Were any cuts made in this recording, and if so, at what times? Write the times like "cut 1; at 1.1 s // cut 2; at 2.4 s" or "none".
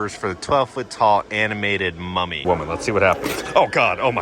cut 1; at 2.4 s